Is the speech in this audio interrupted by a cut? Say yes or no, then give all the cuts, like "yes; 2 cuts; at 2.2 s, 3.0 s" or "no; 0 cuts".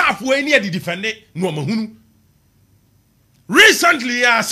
no; 0 cuts